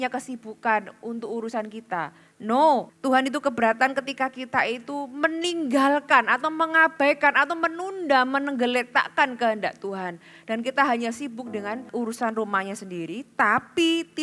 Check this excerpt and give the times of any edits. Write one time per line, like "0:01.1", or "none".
0:02.9
0:11.9